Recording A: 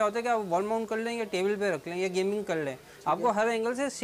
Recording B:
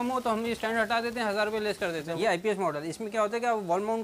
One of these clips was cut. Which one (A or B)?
B